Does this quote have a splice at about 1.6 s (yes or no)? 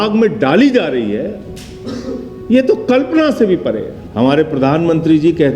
no